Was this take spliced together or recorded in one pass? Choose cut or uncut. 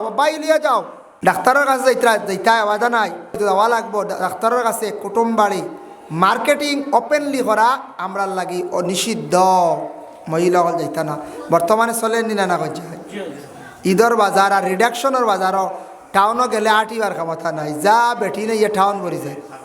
cut